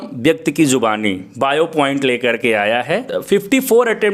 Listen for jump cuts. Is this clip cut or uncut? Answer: cut